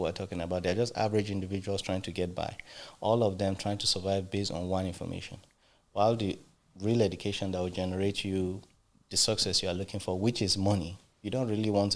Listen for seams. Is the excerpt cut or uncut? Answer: uncut